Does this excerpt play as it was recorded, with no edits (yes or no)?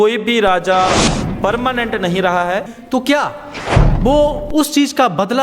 no